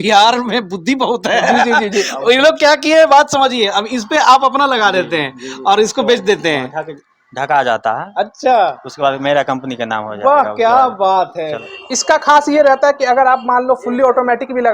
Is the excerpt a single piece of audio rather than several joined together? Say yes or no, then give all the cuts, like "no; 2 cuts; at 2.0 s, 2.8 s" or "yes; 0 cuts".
no; 1 cut; at 11.6 s